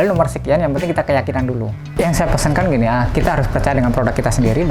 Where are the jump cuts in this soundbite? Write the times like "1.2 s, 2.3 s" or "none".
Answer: 1.8 s